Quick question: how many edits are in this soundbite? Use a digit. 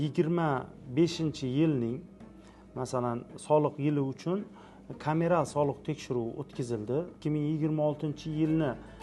1